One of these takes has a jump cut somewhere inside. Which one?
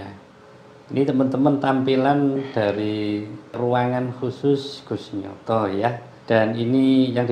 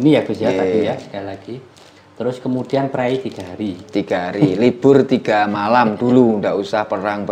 first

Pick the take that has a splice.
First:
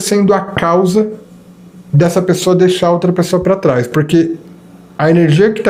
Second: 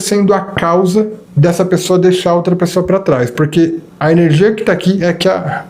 second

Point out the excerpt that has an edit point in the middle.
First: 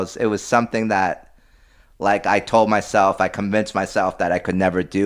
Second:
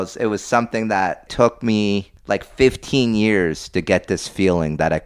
second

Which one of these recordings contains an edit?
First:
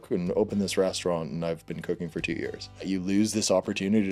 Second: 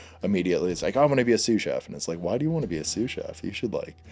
first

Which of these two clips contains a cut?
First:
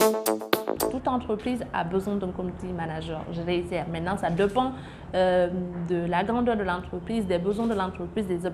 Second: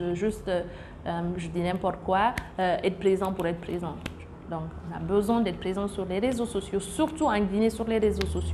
first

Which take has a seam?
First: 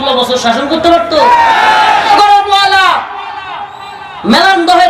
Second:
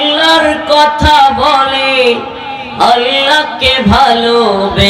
first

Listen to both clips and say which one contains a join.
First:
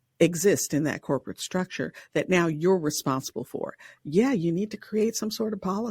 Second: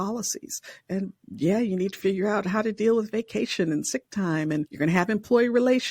second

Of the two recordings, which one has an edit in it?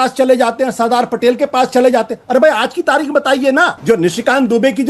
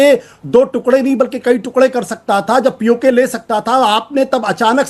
first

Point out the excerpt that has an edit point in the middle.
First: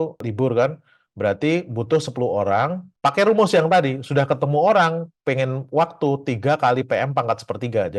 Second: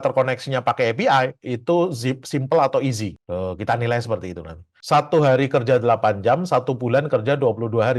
second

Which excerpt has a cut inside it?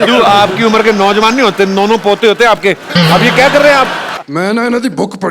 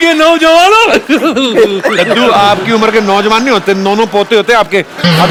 first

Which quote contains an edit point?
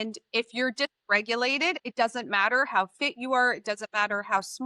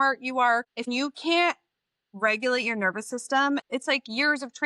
second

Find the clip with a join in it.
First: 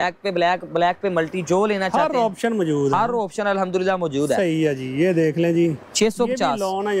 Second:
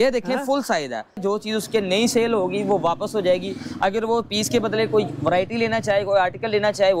second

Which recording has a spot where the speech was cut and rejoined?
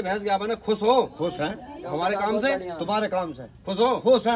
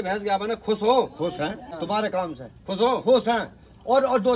second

